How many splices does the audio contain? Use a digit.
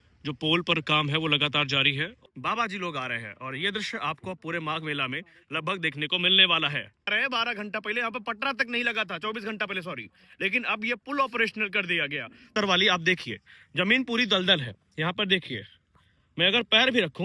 3